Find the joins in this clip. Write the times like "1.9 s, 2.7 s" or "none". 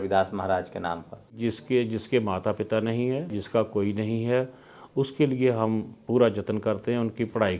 1.3 s, 3.4 s